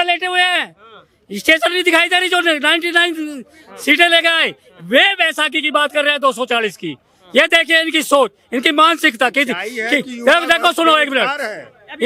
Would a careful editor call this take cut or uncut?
uncut